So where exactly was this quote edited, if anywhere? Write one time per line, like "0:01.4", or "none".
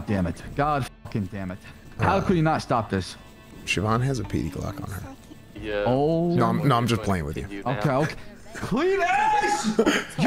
0:05.6